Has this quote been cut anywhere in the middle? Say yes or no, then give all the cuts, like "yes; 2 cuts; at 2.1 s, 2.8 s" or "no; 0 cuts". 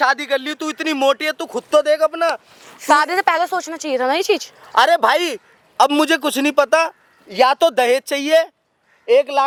no; 0 cuts